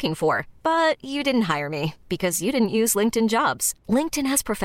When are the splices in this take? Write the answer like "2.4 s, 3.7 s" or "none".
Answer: none